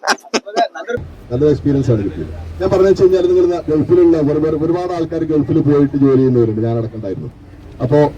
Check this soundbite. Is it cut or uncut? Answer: cut